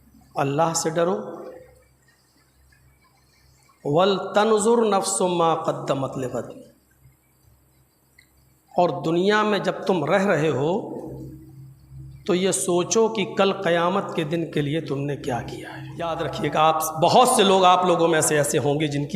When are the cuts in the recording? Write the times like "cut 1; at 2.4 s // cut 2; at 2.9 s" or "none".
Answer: cut 1; at 16.1 s

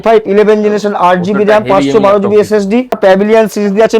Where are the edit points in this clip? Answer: cut 1; at 3.0 s

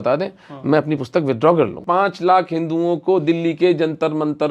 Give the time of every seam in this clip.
cut 1; at 1.8 s

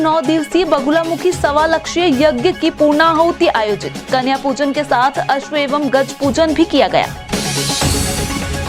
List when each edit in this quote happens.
none

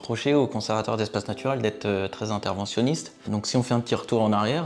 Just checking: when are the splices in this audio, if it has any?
cut 1; at 3.2 s

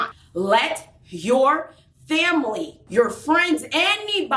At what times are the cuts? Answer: cut 1; at 2.7 s

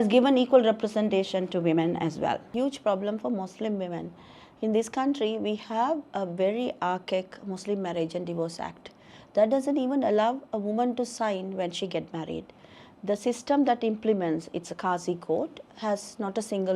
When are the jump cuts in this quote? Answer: cut 1; at 2.5 s

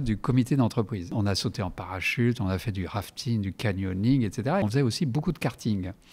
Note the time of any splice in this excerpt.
cut 1; at 1.1 s // cut 2; at 4.6 s

